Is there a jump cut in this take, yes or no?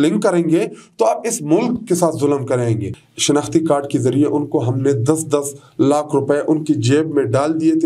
yes